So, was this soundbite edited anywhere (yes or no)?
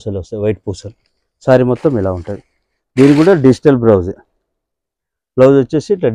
no